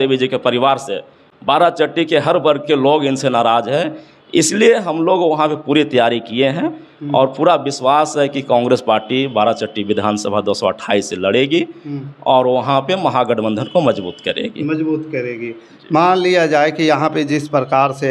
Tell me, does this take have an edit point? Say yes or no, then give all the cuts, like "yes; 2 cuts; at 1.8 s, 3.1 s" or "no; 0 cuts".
no; 0 cuts